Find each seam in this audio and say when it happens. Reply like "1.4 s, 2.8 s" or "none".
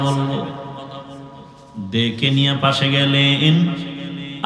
none